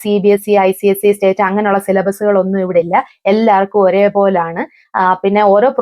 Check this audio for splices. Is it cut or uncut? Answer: uncut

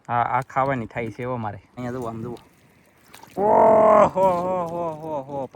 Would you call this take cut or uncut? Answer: cut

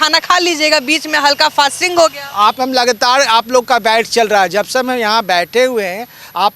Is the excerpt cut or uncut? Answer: uncut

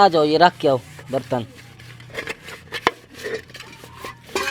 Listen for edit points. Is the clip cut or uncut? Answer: uncut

